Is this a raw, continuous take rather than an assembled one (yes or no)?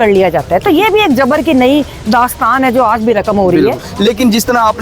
no